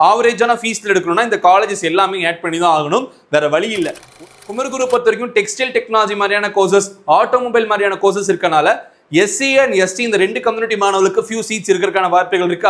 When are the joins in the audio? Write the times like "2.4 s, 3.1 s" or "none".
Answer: 4.1 s